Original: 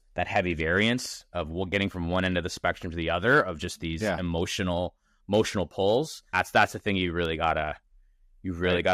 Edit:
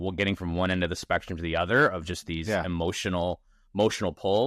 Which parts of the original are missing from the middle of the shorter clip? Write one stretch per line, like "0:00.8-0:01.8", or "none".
none

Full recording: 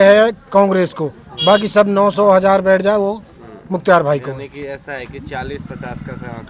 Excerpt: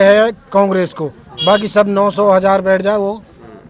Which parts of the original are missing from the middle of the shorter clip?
none

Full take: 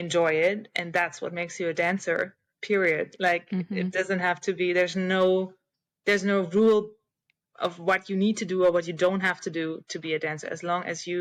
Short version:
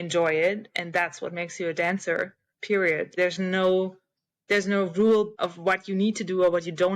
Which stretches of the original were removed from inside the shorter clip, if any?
0:03.2-0:04.7
0:07.0-0:07.6

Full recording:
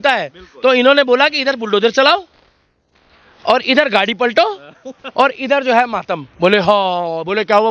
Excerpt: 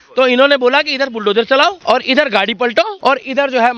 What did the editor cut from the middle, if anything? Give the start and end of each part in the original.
0:02.3-0:03.4
0:04.5-0:05.1

